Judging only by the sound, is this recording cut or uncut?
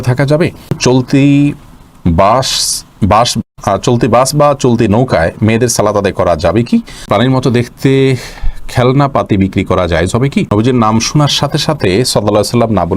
cut